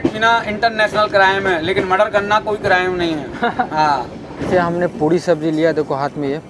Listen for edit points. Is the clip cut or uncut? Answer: cut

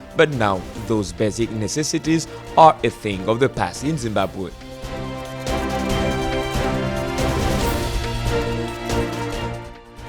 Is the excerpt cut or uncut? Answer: uncut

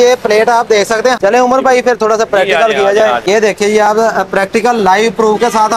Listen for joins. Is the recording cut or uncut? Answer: cut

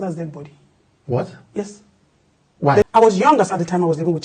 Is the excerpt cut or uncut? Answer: cut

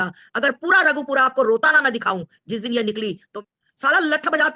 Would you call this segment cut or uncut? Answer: cut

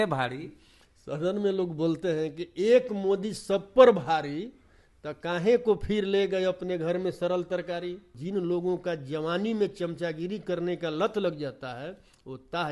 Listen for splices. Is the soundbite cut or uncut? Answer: cut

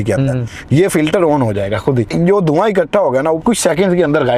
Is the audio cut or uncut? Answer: cut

